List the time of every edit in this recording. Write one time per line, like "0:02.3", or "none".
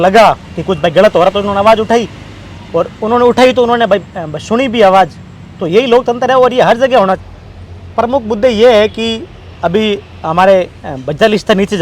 0:07.3